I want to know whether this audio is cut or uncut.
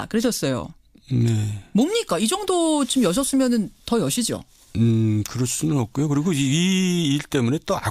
cut